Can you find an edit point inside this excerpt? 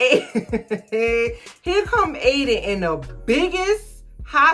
no; 0 cuts

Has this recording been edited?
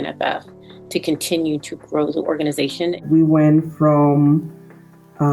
yes; 1 cut; at 3.0 s

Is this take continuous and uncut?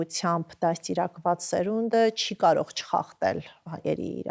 yes; 0 cuts

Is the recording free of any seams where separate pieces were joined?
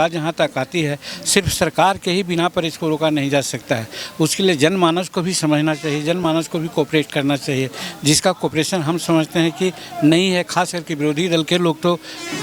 yes; 0 cuts

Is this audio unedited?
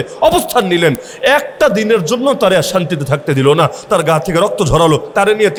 yes; 0 cuts

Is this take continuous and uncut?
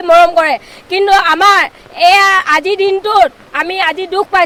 yes; 0 cuts

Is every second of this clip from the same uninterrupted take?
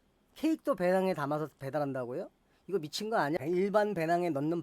no; 1 cut; at 3.4 s

